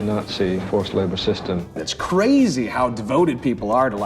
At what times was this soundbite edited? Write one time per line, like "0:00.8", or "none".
0:01.8